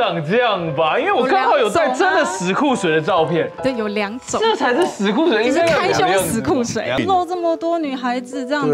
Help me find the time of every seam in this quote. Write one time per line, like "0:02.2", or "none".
0:07.0

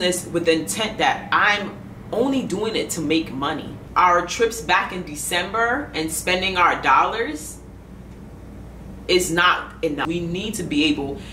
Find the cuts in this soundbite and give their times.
0:03.8
0:10.1

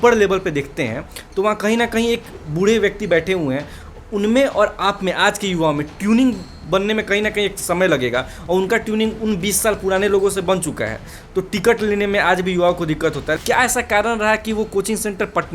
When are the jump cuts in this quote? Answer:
0:13.4

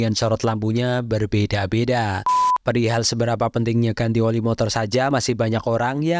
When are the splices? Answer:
0:02.4

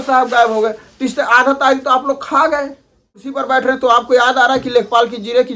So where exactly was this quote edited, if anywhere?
0:03.4

